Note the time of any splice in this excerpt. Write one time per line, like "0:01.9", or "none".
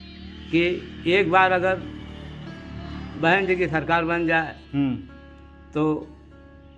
none